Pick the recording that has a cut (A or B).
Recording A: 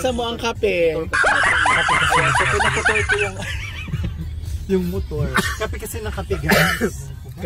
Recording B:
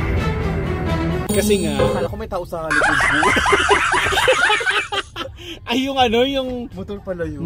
B